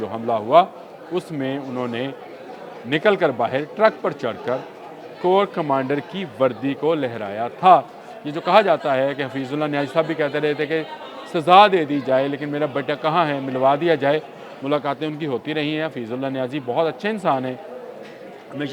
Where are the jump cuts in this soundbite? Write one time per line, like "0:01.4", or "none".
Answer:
none